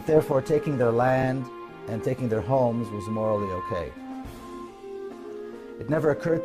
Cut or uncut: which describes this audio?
uncut